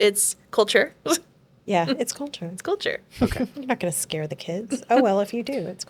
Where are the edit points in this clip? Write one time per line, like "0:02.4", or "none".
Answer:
none